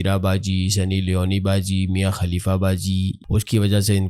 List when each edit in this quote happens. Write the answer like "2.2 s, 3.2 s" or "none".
3.2 s

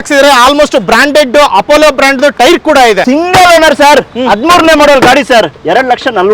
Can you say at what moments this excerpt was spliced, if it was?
3.0 s, 5.6 s

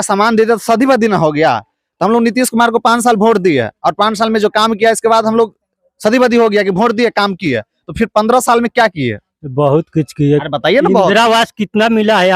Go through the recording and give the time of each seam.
none

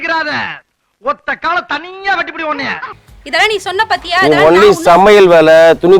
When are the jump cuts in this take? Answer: 2.8 s

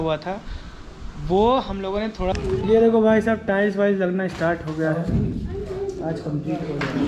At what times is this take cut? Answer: 2.4 s

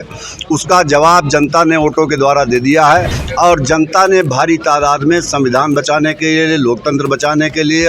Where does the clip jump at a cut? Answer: 3.2 s

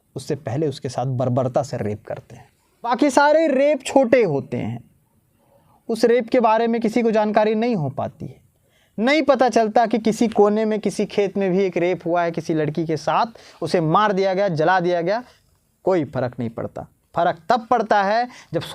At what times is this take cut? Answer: 2.9 s

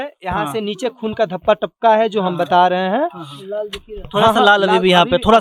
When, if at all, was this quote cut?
none

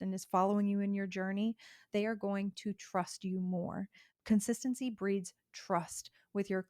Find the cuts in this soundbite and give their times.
4.1 s

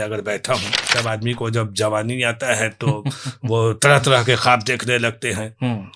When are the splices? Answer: 0.9 s

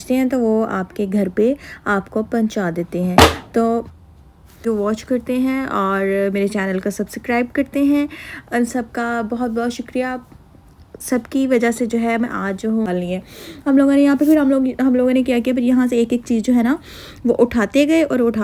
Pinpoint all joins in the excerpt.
4.6 s, 12.9 s

